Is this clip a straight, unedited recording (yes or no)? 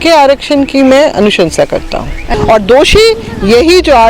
no